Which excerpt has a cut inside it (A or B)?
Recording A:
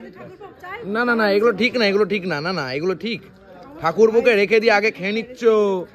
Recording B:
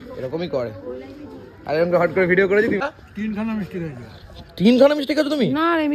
B